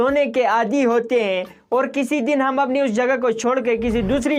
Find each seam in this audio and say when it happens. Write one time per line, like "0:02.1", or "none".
none